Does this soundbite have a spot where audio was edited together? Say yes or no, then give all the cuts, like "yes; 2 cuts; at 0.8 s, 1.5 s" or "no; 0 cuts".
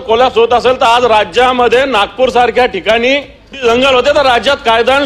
yes; 1 cut; at 3.6 s